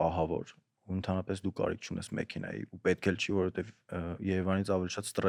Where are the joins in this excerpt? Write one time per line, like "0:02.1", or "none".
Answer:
none